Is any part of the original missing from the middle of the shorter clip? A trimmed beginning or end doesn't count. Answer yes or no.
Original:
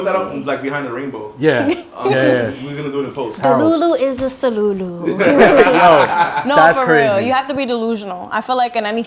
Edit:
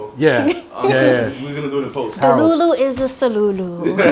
no